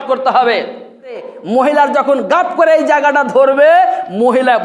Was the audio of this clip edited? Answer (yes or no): yes